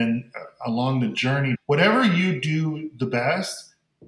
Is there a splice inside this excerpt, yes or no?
no